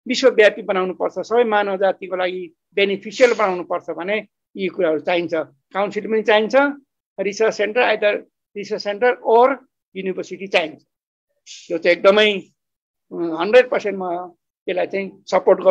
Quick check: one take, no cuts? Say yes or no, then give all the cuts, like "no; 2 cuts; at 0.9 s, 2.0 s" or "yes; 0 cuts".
yes; 0 cuts